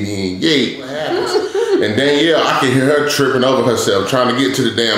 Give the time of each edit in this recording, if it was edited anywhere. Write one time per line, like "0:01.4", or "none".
0:01.0